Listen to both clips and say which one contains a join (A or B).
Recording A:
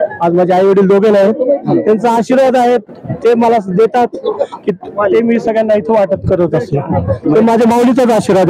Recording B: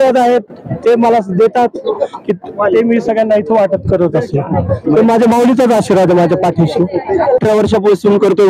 B